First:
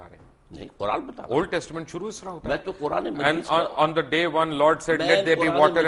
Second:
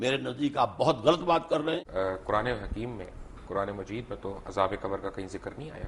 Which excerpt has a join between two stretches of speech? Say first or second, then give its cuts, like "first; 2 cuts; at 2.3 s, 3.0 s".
second; 1 cut; at 1.8 s